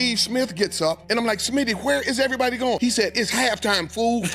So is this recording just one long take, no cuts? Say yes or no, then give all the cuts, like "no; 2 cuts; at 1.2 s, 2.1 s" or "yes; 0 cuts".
no; 2 cuts; at 1.0 s, 2.8 s